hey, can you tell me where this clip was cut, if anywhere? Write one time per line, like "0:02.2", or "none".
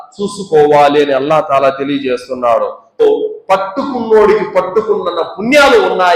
0:03.0